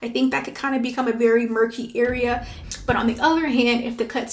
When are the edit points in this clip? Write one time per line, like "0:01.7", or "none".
0:02.6